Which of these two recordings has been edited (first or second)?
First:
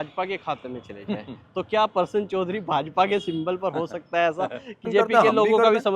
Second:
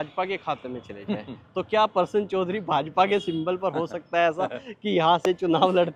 first